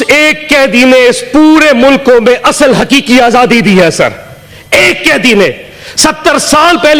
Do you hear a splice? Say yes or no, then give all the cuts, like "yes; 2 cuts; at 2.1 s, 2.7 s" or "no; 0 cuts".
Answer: no; 0 cuts